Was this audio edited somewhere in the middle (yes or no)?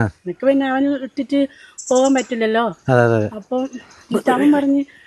no